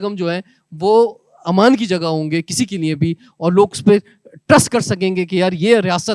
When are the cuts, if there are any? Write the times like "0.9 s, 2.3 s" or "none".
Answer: none